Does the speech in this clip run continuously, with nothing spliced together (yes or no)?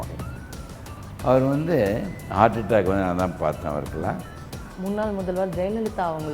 no